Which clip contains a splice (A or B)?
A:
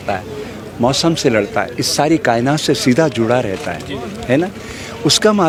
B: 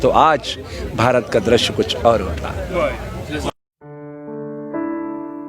B